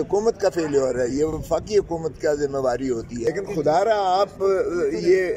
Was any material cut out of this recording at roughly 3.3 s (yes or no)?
yes